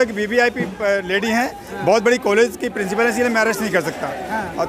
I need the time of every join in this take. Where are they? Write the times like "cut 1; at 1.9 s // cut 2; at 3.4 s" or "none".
none